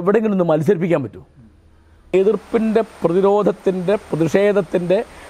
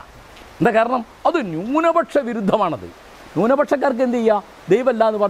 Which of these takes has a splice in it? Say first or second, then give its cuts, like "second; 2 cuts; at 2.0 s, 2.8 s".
first; 1 cut; at 2.0 s